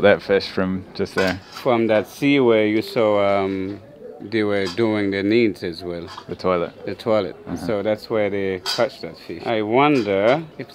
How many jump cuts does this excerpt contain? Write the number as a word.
zero